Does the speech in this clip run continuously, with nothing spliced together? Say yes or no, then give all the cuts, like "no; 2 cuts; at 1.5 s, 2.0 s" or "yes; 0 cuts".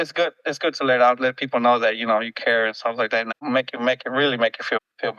yes; 0 cuts